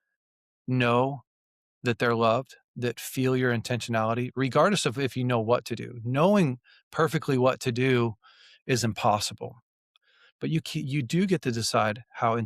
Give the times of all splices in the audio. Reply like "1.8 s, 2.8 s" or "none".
9.8 s